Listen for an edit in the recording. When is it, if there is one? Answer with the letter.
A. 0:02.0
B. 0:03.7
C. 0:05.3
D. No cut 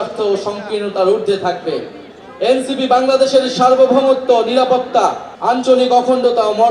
C